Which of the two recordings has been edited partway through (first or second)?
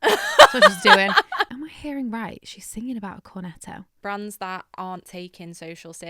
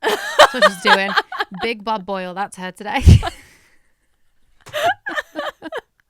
first